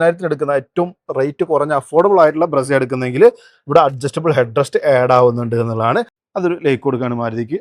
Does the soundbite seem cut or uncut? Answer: cut